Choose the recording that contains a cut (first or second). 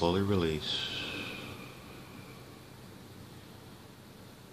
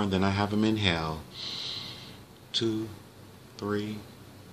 second